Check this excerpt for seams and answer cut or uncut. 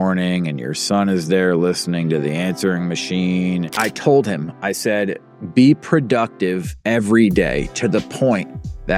cut